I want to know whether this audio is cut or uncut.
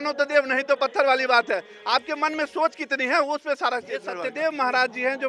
cut